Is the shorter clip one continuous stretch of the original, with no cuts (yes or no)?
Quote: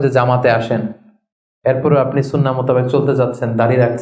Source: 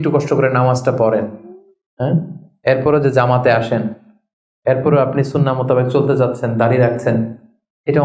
yes